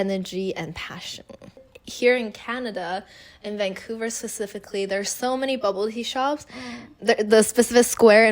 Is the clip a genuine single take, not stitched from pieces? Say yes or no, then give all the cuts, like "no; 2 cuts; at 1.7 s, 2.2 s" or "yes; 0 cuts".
no; 1 cut; at 1.6 s